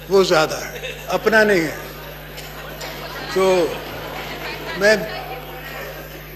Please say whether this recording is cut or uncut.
uncut